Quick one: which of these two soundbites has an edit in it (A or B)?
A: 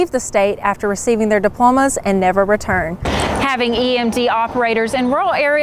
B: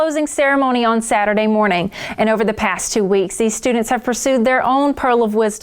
A